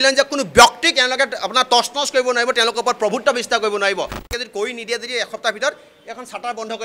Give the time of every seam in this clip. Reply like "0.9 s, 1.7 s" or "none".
4.2 s